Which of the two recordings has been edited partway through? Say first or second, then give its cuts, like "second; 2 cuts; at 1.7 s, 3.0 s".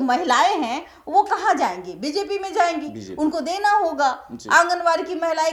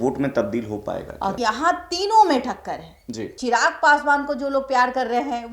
second; 2 cuts; at 1.3 s, 3.3 s